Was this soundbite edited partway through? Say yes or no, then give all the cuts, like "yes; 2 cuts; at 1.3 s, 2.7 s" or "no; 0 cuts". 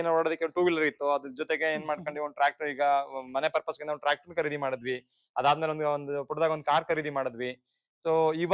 no; 0 cuts